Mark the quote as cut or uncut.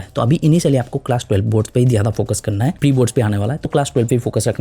uncut